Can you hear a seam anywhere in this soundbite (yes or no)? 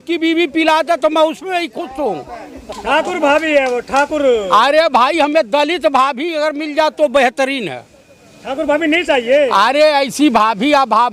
no